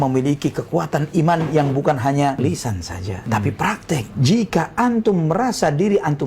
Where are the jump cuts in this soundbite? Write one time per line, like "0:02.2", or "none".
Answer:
0:02.4
0:04.1